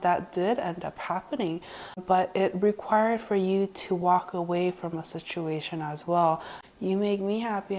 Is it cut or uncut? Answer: cut